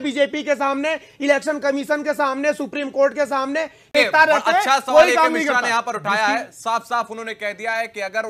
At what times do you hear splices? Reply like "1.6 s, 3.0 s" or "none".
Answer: 3.9 s